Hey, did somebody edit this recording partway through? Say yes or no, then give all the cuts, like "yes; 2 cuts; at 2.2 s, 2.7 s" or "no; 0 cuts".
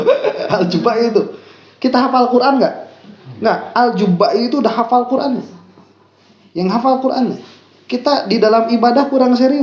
no; 0 cuts